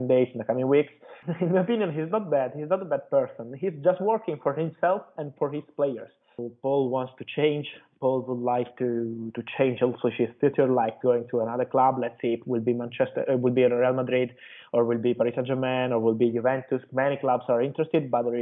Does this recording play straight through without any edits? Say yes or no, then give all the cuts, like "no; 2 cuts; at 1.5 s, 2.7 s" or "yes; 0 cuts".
no; 2 cuts; at 1.1 s, 6.5 s